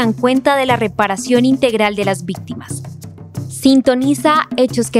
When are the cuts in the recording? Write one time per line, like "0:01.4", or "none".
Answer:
none